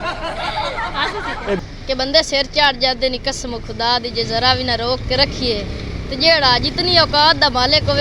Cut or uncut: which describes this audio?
cut